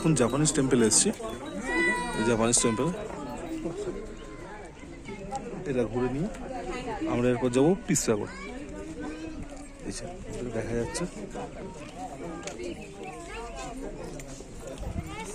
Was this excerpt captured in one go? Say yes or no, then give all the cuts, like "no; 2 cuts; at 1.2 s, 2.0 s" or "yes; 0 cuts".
yes; 0 cuts